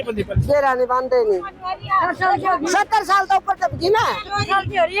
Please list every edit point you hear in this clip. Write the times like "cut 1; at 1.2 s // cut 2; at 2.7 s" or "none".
none